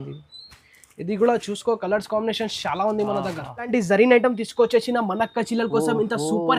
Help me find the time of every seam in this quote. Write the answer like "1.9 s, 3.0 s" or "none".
3.7 s

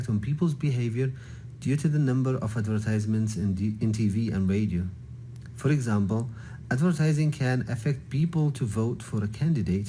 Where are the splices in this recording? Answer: 3.5 s, 4.7 s, 6.1 s

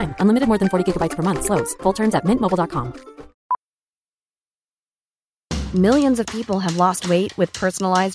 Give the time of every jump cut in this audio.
3.3 s

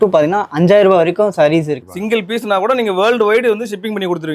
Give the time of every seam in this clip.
1.8 s

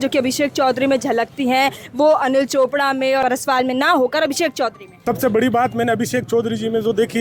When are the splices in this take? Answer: 3.2 s, 4.9 s

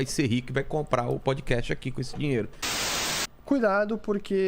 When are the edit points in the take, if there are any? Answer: 2.8 s

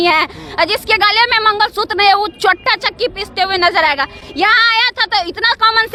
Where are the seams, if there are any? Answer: none

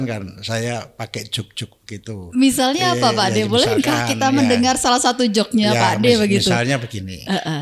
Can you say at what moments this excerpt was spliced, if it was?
none

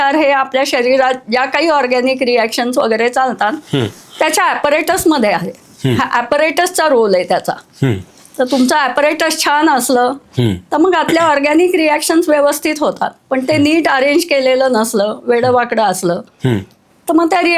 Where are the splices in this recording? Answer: none

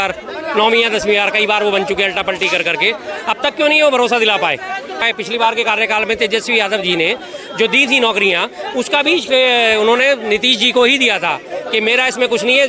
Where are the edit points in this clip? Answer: 5.0 s

